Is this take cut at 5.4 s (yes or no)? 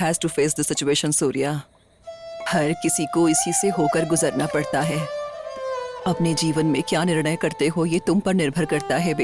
yes